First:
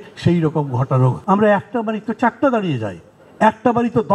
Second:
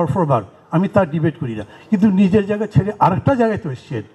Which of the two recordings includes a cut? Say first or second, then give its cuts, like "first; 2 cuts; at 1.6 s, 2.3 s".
first; 1 cut; at 1.2 s